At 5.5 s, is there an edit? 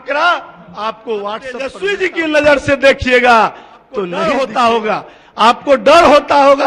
no; 2 cuts; at 1.8 s, 4.1 s

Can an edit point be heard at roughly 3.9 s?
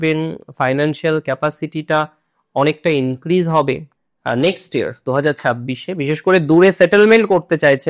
yes; 1 cut; at 3.9 s

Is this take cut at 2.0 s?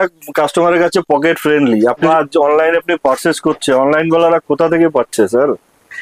yes; 1 cut; at 2.0 s

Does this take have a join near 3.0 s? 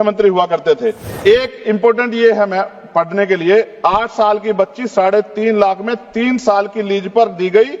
no; 1 cut; at 1.1 s

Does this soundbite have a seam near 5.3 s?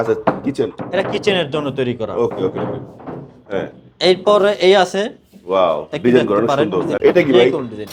no; 1 cut; at 7.0 s

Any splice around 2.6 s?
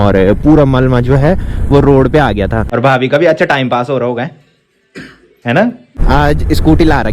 yes; 2 cuts; at 2.6 s, 5.9 s

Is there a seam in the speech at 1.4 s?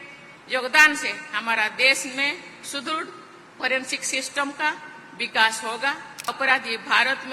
no; 1 cut; at 6.3 s

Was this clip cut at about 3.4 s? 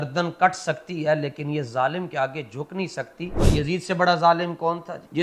yes; 1 cut; at 3.4 s

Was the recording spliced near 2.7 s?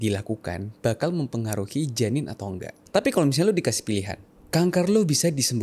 yes; 1 cut; at 2.7 s

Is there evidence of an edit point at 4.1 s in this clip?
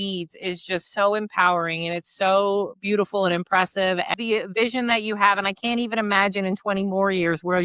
yes; 1 cut; at 4.1 s

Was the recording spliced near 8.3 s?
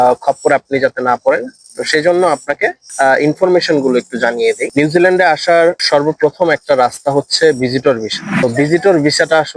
yes; 1 cut; at 8.3 s

